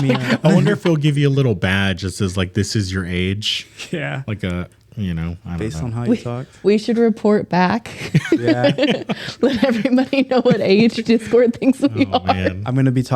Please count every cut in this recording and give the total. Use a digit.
0